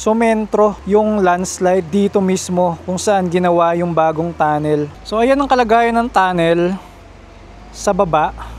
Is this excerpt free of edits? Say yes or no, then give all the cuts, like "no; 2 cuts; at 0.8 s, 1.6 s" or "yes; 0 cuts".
no; 3 cuts; at 0.8 s, 1.9 s, 5.0 s